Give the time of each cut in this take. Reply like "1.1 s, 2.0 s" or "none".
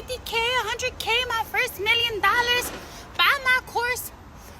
none